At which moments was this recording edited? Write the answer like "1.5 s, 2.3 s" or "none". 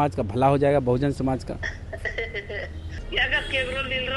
3.0 s